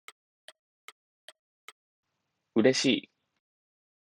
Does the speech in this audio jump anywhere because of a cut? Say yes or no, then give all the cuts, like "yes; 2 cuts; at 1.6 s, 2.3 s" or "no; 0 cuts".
no; 0 cuts